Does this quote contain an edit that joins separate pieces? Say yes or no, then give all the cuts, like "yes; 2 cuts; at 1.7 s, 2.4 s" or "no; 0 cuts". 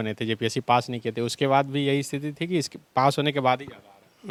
no; 0 cuts